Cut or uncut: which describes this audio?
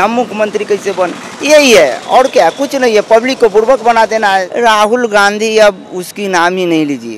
cut